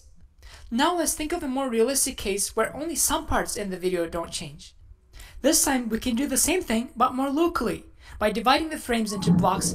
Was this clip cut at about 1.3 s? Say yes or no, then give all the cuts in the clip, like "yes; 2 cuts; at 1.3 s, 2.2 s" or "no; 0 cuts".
no; 1 cut; at 6.2 s